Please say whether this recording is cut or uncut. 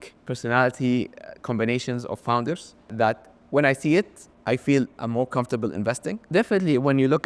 cut